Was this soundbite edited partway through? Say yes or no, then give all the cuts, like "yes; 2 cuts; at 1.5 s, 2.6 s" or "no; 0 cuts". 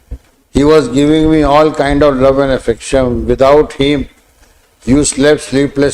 no; 0 cuts